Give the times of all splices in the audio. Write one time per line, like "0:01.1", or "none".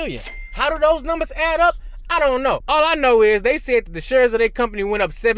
0:02.6